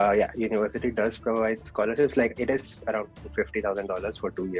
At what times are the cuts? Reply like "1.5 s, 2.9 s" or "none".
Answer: none